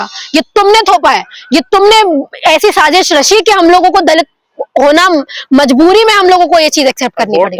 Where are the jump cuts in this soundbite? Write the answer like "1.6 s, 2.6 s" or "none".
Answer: none